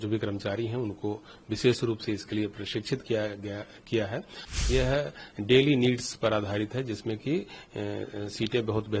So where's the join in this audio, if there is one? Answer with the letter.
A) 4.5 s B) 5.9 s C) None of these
A